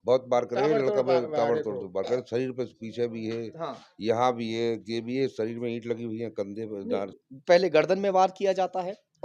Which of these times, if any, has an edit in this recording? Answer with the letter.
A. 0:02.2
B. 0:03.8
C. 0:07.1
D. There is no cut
C